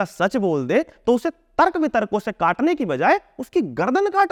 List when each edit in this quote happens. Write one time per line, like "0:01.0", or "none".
none